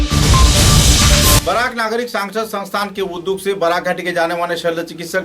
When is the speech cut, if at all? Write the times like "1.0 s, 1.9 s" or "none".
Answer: 1.4 s